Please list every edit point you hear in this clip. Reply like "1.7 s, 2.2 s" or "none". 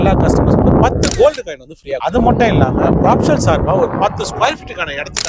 none